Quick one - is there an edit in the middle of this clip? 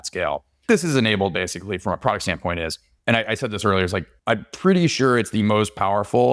yes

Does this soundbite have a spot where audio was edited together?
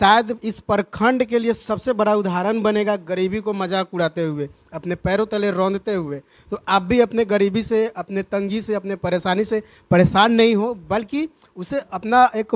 no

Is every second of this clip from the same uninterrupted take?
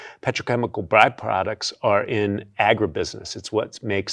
yes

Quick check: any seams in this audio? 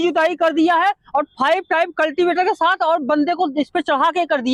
no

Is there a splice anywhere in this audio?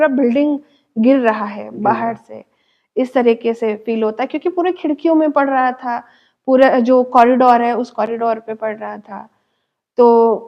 no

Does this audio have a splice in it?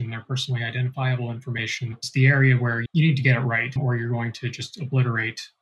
no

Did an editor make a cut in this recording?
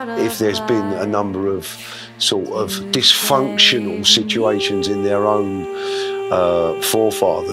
no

